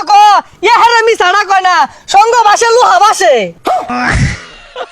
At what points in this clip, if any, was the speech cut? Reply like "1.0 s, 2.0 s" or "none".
3.9 s